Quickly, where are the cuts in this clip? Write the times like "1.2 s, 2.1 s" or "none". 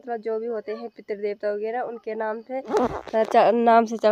none

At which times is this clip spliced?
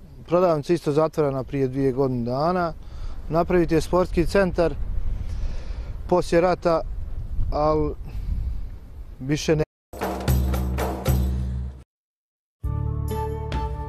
none

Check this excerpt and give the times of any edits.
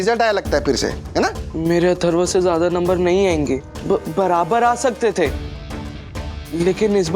1.4 s, 3.7 s

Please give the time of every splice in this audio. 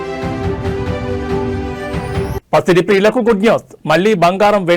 2.3 s

